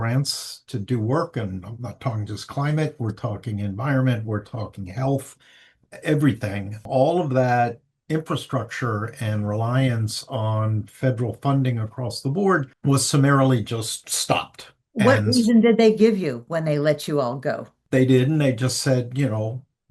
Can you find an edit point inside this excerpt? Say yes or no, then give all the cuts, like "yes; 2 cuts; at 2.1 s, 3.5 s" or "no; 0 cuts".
yes; 1 cut; at 12.7 s